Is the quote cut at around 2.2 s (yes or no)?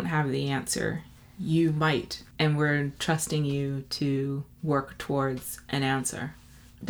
yes